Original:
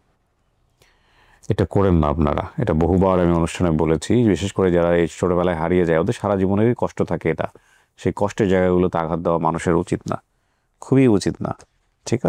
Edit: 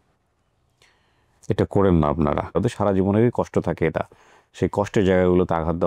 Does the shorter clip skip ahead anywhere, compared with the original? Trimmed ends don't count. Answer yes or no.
yes